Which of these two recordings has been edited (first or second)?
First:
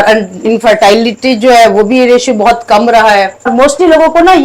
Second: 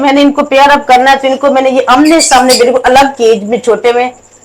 first